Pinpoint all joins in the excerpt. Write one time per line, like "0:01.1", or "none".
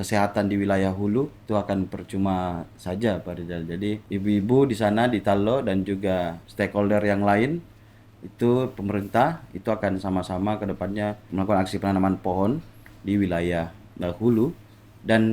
0:01.4
0:04.0
0:06.4
0:11.3